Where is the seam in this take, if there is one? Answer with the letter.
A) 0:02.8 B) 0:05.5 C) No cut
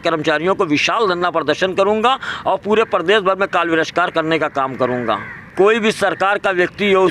B